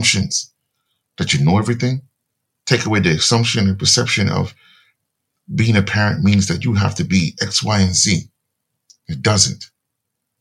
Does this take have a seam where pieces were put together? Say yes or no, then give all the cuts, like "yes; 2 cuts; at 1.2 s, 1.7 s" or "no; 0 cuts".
no; 0 cuts